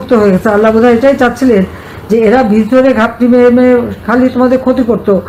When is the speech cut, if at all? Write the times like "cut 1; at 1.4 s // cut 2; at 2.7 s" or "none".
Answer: none